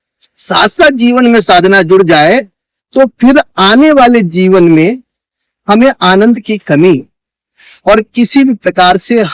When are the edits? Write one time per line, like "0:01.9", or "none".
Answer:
none